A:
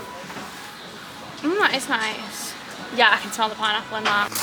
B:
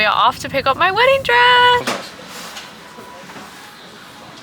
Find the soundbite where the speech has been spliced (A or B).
B